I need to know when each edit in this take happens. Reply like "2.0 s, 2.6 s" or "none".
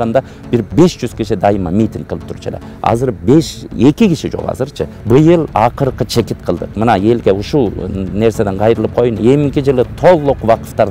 4.9 s